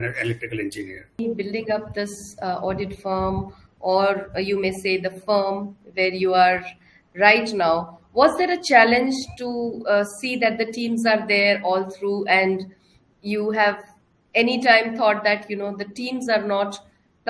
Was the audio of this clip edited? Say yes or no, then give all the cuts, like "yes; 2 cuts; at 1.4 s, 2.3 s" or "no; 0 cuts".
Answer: yes; 1 cut; at 1.2 s